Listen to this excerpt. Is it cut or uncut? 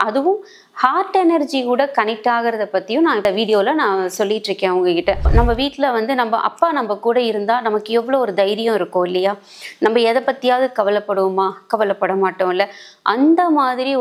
cut